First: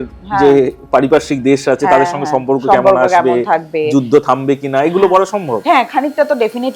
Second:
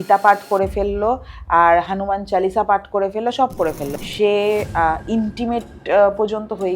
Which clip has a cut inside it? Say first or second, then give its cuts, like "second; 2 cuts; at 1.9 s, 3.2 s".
second; 1 cut; at 3.9 s